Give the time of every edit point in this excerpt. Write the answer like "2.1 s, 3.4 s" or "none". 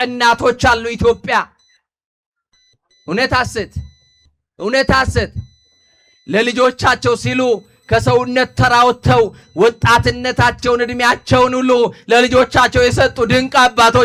none